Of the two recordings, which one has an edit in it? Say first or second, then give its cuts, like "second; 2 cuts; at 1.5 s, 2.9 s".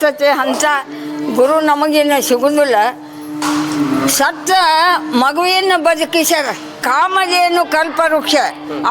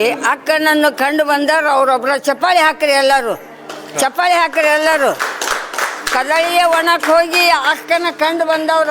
first; 1 cut; at 6.8 s